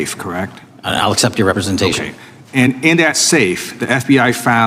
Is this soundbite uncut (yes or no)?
yes